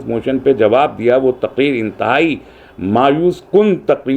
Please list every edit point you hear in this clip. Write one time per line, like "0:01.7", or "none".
none